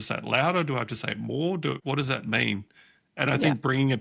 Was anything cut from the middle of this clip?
yes; 1 cut; at 1.8 s

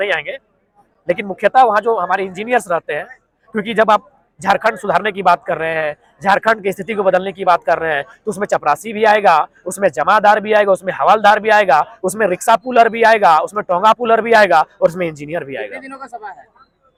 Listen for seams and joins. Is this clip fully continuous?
yes; 0 cuts

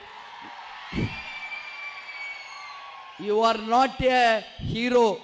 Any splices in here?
no; 0 cuts

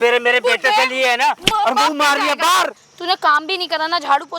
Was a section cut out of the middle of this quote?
yes; 1 cut; at 2.8 s

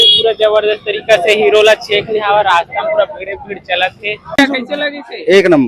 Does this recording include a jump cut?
yes; 1 cut; at 4.4 s

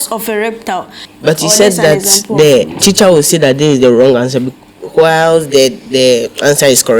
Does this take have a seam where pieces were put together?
yes; 1 cut; at 1.0 s

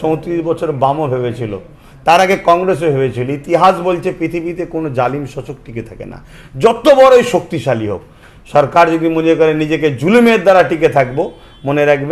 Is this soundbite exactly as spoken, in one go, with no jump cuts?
yes; 0 cuts

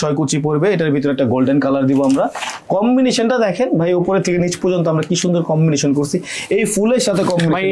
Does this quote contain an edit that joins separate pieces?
no; 0 cuts

